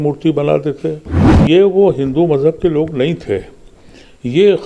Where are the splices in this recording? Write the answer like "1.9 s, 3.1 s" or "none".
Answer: 1.3 s